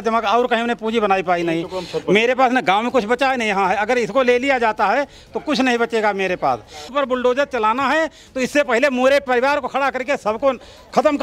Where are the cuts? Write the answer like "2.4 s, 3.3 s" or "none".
6.8 s